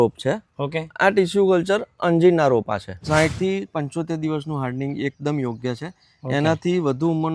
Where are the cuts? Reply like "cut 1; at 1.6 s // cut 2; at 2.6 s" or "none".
cut 1; at 2.9 s